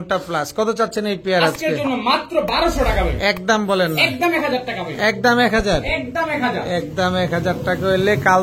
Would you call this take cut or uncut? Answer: uncut